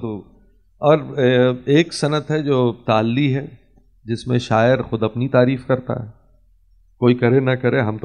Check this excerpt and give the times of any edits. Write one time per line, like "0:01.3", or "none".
none